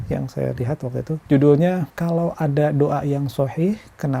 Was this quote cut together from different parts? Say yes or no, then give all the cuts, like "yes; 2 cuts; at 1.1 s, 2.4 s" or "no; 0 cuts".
yes; 2 cuts; at 1.2 s, 1.9 s